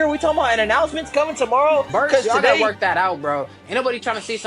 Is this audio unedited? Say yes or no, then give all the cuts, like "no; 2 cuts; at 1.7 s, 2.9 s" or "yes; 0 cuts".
no; 1 cut; at 2.6 s